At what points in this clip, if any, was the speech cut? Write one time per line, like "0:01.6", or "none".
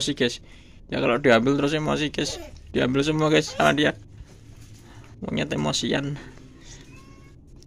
none